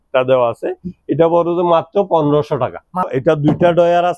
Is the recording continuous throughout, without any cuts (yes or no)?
no